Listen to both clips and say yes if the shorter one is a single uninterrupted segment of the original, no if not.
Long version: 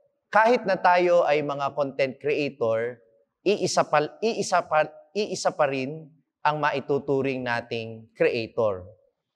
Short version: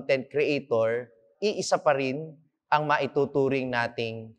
no